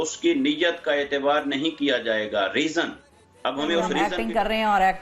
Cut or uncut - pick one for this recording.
cut